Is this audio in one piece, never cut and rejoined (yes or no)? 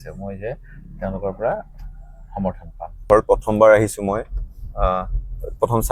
no